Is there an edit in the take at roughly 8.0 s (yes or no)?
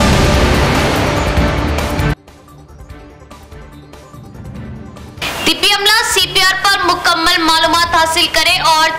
no